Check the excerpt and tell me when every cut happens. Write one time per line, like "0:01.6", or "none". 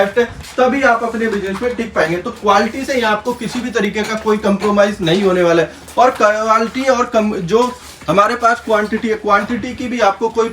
none